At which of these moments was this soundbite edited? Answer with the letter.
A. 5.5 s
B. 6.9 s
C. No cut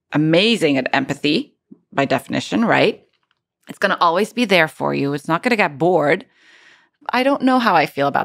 B